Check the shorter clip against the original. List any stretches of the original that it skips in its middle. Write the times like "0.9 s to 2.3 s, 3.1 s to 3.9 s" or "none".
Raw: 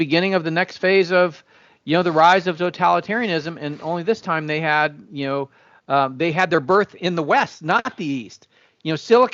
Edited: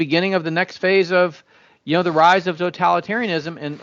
none